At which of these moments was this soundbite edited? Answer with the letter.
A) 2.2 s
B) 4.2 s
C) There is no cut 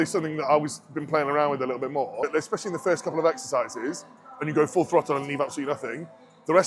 A